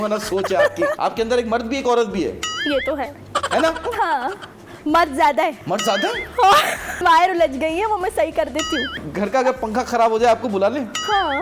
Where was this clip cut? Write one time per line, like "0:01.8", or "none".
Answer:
0:01.0
0:05.6
0:07.0
0:09.0